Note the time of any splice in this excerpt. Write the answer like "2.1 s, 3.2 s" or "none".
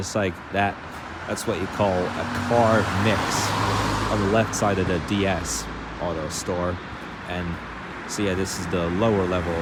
none